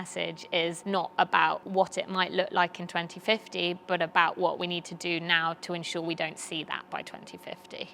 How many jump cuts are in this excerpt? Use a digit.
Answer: 2